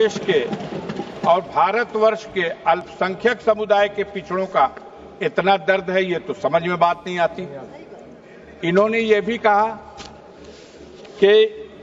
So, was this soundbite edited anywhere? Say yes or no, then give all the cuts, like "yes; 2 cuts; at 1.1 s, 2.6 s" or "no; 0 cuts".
no; 0 cuts